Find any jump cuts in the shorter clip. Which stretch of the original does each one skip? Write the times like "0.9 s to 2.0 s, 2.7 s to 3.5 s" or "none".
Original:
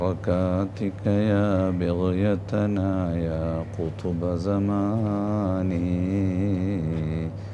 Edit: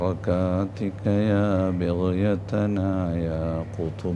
none